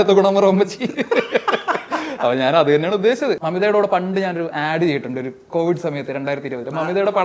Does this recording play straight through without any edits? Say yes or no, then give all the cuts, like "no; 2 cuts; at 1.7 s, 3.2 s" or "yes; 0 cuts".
no; 1 cut; at 3.4 s